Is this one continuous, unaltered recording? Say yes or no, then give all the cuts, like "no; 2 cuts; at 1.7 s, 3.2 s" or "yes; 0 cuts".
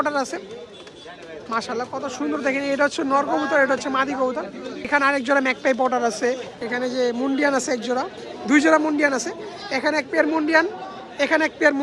no; 2 cuts; at 4.9 s, 6.5 s